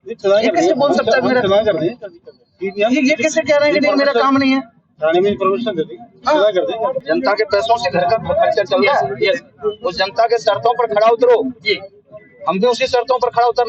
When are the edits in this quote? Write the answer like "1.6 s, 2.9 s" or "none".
7.0 s

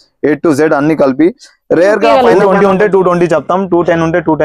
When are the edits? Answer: 2.1 s

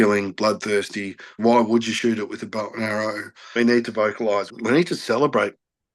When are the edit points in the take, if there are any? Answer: 1.3 s, 3.5 s, 4.5 s

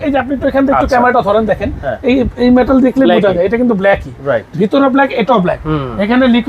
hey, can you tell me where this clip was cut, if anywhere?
none

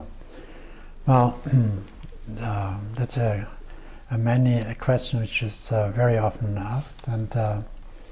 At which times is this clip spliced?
none

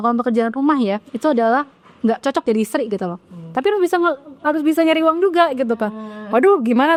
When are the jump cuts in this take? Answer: none

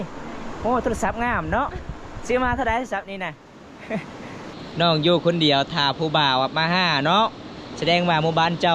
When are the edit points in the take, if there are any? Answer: 4.6 s

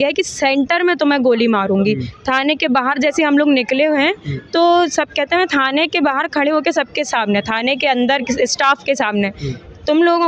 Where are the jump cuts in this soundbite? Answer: none

